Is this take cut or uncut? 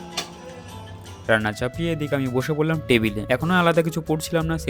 uncut